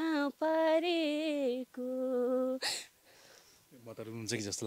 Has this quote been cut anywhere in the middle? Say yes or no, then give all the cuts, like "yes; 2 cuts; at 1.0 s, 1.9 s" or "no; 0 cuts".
no; 0 cuts